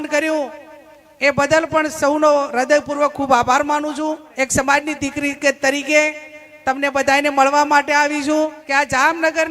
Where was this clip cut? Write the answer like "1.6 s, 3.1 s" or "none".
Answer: 4.3 s, 8.6 s

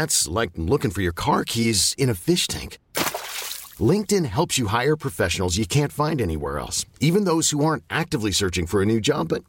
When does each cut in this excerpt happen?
none

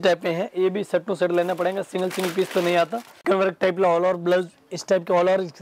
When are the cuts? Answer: 3.1 s

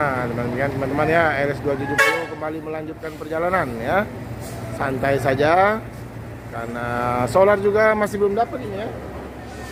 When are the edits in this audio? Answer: none

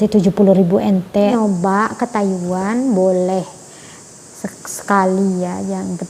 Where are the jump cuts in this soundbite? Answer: 1.3 s

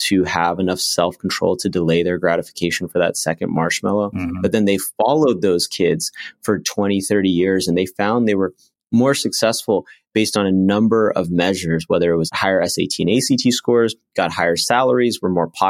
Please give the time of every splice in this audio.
12.3 s

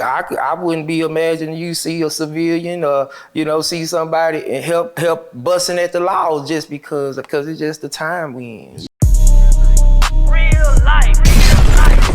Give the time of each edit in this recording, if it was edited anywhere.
8.8 s

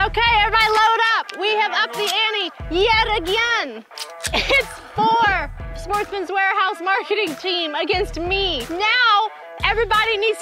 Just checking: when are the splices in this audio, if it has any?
4.3 s, 8.6 s

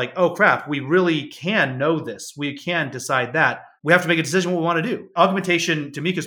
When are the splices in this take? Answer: 3.7 s, 5.1 s

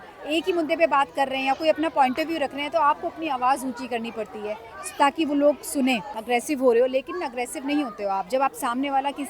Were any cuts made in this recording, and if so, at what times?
6.1 s

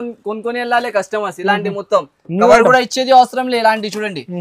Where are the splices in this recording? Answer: none

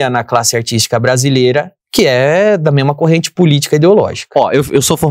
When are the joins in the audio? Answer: 1.8 s

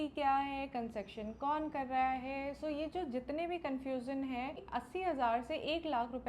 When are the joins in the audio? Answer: 4.6 s

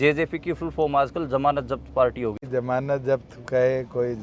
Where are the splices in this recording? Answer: 2.4 s

